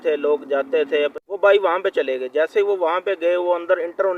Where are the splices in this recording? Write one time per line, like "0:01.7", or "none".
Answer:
0:01.2